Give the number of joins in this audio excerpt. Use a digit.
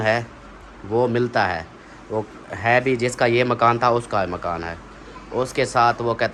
0